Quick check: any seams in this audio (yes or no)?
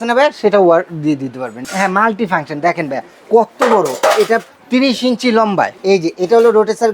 yes